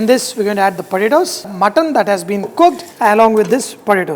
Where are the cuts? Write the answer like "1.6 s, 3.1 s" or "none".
1.5 s, 2.9 s